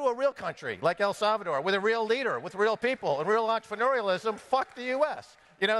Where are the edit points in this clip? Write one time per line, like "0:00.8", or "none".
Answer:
none